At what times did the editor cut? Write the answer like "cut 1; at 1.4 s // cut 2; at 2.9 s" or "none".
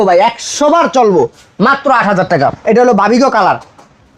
cut 1; at 2.6 s